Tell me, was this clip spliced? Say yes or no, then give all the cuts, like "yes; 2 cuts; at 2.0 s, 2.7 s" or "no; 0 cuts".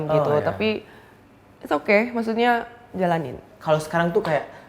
yes; 1 cut; at 3.4 s